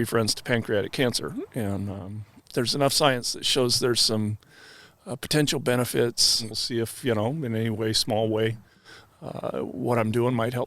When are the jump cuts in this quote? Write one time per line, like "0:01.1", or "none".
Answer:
0:02.4
0:06.4